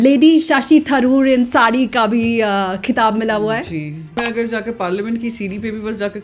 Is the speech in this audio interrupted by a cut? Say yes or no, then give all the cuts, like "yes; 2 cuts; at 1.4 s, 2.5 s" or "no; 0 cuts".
yes; 1 cut; at 4.2 s